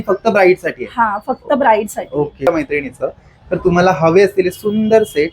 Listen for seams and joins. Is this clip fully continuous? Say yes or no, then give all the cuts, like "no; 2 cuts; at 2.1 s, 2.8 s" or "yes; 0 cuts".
no; 1 cut; at 2.5 s